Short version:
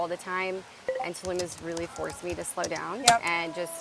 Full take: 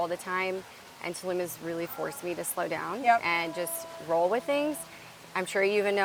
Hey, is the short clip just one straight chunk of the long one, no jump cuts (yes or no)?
yes